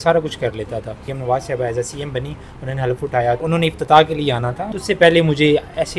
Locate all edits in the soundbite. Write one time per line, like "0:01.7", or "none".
0:01.0
0:03.4
0:04.6